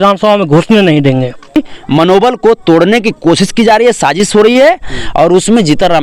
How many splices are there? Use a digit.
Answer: 1